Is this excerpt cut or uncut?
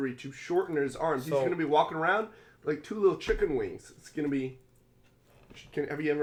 uncut